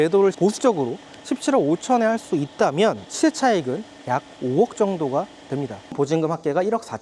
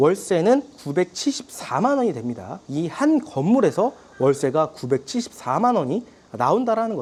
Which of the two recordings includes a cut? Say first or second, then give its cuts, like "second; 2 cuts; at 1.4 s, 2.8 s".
first; 1 cut; at 5.9 s